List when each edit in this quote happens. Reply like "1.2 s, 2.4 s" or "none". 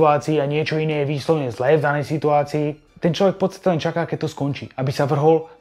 2.8 s